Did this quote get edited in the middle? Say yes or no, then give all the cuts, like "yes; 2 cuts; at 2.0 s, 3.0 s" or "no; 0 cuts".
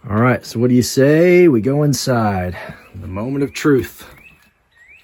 no; 0 cuts